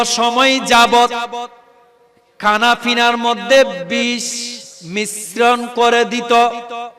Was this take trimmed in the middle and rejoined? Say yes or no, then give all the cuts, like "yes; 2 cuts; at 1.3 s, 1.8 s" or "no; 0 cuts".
no; 0 cuts